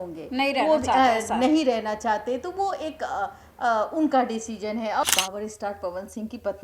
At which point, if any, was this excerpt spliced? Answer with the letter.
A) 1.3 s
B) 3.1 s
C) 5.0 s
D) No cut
C